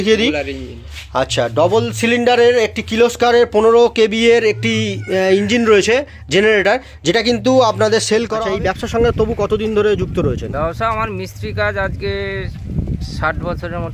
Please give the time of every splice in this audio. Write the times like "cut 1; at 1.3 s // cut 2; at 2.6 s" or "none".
cut 1; at 8.4 s